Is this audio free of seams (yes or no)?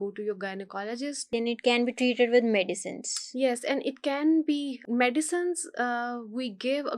no